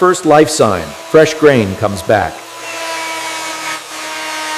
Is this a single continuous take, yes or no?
yes